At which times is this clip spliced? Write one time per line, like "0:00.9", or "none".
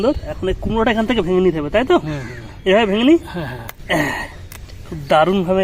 none